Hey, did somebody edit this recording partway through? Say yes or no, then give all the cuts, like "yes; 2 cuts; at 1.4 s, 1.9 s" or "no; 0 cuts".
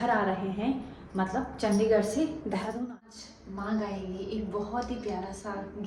yes; 1 cut; at 2.8 s